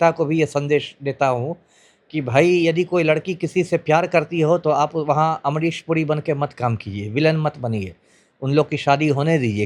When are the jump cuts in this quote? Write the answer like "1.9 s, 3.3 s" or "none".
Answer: none